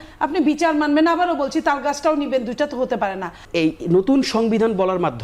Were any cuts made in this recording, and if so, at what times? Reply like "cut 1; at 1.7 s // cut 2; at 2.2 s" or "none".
cut 1; at 3.4 s